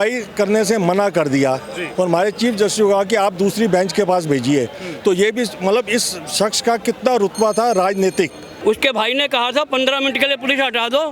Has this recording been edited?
yes; 1 cut; at 8.4 s

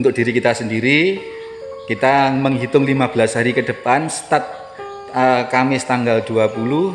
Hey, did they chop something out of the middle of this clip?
no; 0 cuts

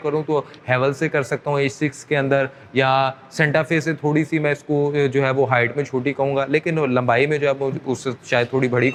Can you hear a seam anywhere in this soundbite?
no; 0 cuts

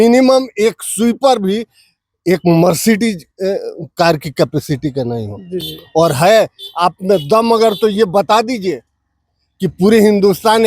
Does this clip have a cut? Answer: no; 0 cuts

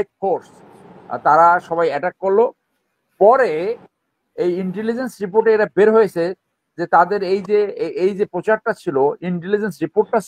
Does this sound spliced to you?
no; 0 cuts

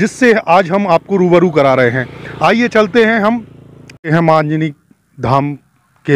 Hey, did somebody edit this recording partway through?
no; 0 cuts

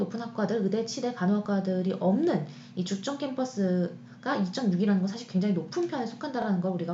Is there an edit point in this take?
no; 0 cuts

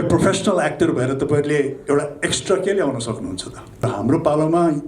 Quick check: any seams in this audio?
yes; 1 cut; at 3.9 s

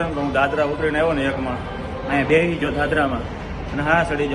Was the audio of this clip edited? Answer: no; 0 cuts

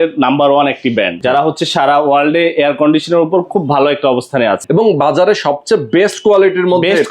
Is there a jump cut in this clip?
yes; 2 cuts; at 1.2 s, 4.6 s

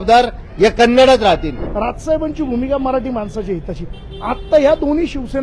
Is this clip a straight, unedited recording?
no; 1 cut; at 1.6 s

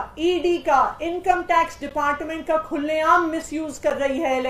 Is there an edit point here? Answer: no; 0 cuts

